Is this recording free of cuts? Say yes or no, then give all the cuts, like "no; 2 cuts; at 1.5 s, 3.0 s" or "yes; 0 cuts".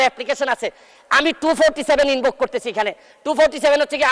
yes; 0 cuts